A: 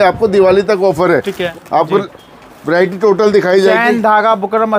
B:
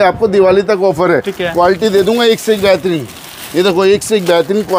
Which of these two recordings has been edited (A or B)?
A